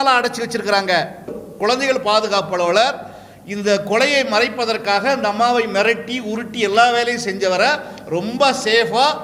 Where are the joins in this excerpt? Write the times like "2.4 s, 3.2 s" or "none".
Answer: 1.4 s